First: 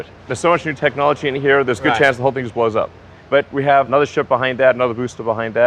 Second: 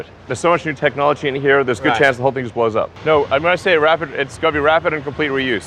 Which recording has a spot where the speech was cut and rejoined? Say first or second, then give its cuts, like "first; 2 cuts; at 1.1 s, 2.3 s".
second; 1 cut; at 2.9 s